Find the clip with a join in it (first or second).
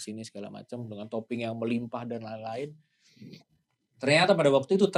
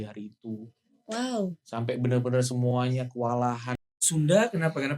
second